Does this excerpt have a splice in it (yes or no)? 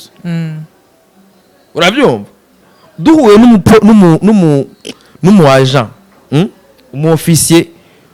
no